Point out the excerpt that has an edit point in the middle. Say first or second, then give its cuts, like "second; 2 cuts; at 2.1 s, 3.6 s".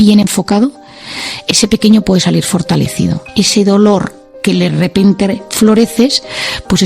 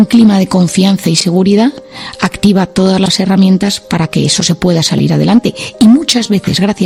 first; 1 cut; at 3.2 s